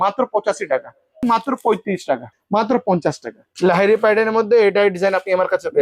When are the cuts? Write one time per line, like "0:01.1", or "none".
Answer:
0:01.2
0:02.4
0:03.4